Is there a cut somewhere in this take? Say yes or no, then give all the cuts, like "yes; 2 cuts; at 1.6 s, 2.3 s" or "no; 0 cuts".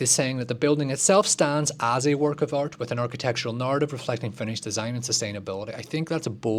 no; 0 cuts